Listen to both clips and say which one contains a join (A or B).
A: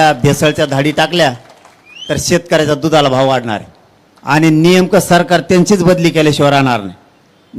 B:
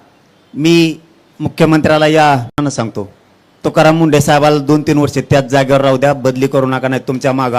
B